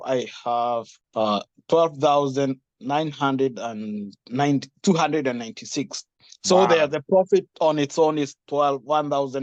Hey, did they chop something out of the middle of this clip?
no; 0 cuts

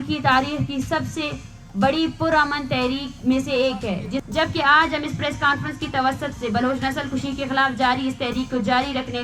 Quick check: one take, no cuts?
no; 1 cut; at 4.2 s

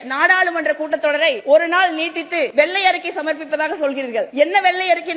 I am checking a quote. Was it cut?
yes; 3 cuts; at 1.4 s, 2.5 s, 4.3 s

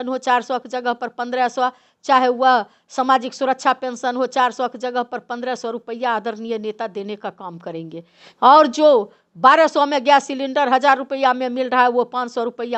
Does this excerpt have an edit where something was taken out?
no; 0 cuts

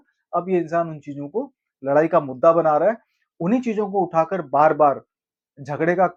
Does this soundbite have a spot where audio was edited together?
no; 0 cuts

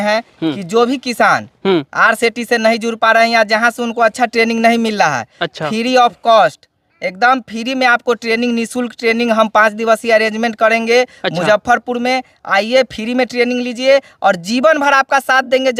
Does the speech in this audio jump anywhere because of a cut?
no; 0 cuts

